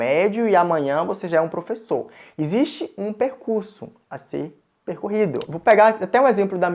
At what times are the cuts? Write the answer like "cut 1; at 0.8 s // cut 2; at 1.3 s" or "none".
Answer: cut 1; at 5.5 s